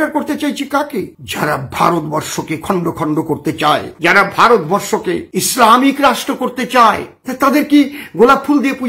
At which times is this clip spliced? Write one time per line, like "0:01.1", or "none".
0:01.1
0:07.1